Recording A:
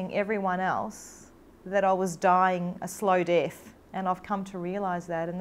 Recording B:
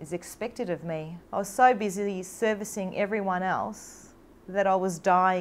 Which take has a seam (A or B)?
B